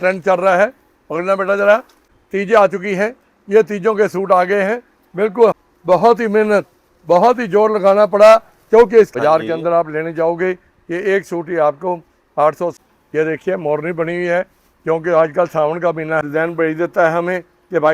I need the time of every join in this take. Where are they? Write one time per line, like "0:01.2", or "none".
0:02.1
0:05.5
0:09.1
0:12.7
0:16.2

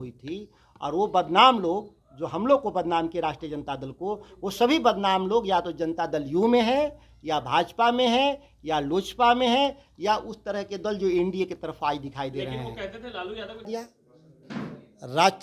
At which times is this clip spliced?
0:13.6

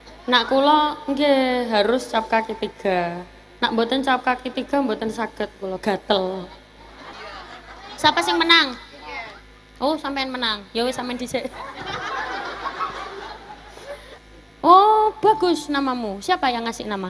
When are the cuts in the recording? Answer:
0:07.1
0:14.1

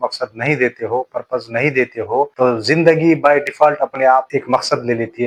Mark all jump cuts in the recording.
none

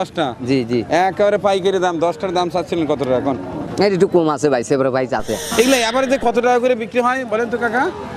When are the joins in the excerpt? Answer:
0:03.6
0:05.5

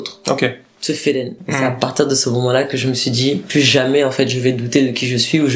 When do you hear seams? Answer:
0:01.4

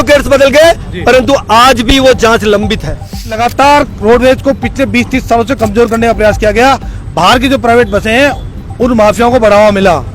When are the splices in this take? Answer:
0:03.4

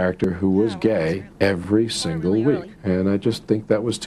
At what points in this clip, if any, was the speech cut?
0:01.3
0:02.7

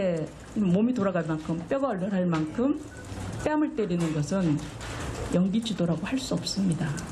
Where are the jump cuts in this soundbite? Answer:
0:04.8

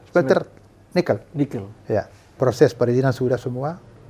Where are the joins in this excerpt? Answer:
0:02.2

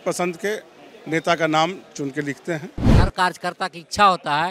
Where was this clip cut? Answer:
0:02.9

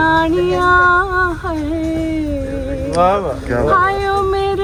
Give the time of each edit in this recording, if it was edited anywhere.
none

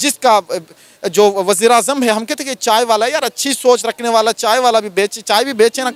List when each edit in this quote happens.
none

